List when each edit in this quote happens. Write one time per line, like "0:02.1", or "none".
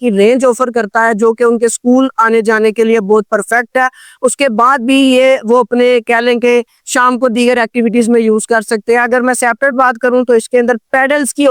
none